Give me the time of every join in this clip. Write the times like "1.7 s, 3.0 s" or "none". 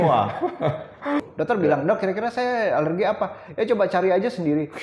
1.3 s